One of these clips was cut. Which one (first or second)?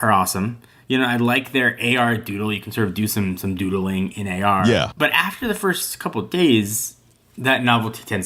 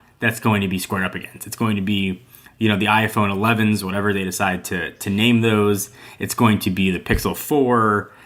first